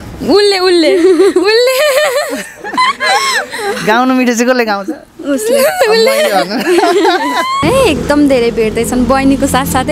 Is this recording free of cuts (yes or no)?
no